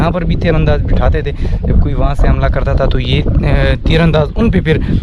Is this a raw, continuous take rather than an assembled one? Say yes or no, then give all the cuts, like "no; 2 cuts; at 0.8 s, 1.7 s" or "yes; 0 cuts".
yes; 0 cuts